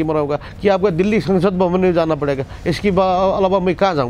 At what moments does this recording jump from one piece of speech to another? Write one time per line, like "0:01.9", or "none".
none